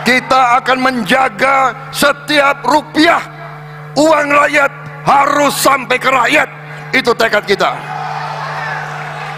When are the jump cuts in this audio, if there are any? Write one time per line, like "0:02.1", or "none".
none